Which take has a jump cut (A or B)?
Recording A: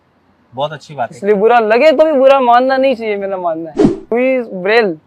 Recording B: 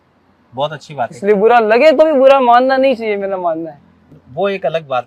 A